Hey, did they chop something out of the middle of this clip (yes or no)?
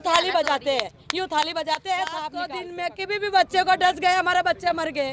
yes